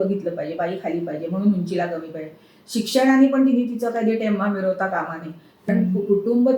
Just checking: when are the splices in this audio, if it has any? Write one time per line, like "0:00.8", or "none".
0:05.7

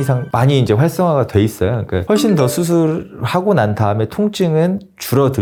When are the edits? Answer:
none

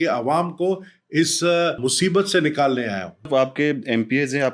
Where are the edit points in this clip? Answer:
0:01.8
0:03.3

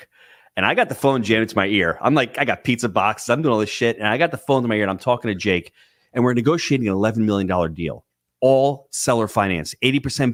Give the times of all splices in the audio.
none

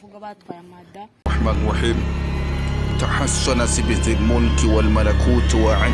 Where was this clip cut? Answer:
0:01.2

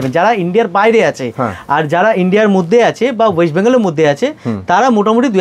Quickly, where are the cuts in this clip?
none

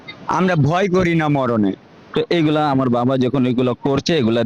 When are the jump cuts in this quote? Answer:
0:02.0

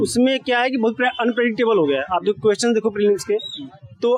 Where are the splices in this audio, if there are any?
none

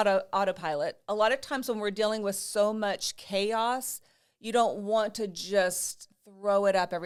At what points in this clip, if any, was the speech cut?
none

